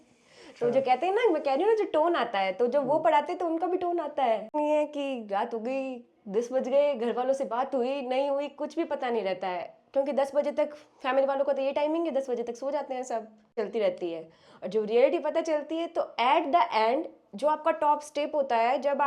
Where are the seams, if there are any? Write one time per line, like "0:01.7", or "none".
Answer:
0:04.5
0:13.5

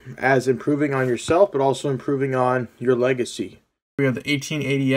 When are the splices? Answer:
0:04.0

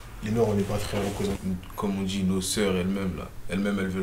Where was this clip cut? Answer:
0:01.4

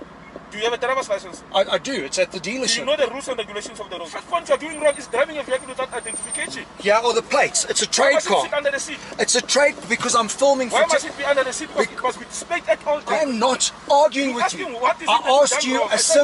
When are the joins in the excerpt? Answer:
0:04.1
0:13.2

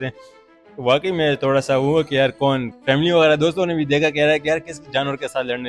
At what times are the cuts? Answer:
0:02.7

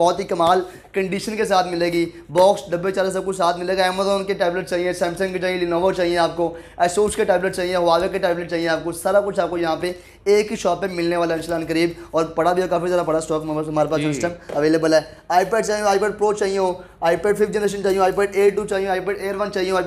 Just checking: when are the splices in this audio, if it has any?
none

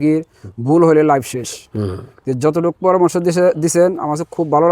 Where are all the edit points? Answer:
none

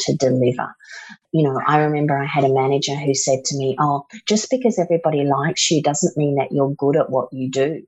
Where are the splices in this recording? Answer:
0:01.2

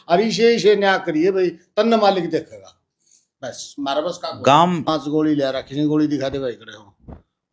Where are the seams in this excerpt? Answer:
0:04.9

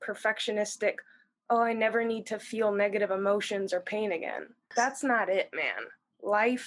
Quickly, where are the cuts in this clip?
0:04.7

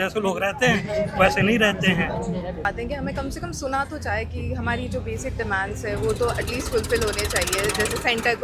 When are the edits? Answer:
0:02.6

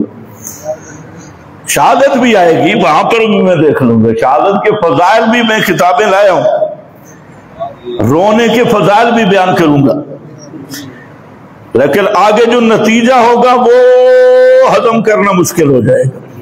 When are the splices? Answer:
none

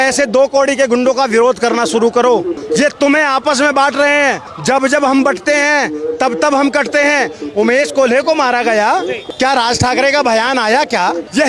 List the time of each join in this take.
0:02.6
0:04.5
0:09.2

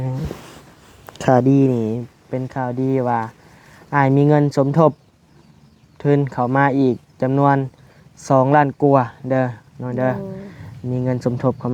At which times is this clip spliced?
none

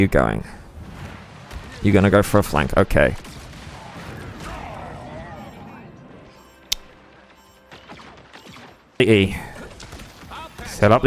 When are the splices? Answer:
0:09.0

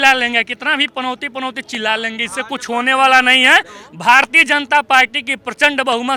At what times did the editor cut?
none

